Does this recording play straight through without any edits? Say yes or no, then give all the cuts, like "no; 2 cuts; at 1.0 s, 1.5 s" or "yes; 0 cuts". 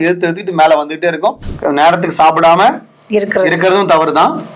no; 1 cut; at 1.5 s